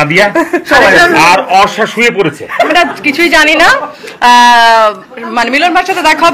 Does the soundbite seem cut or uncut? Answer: cut